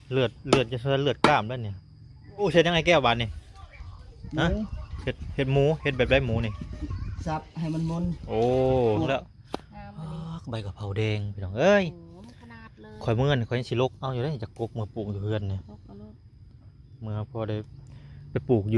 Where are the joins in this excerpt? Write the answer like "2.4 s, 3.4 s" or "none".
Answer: 2.4 s, 9.1 s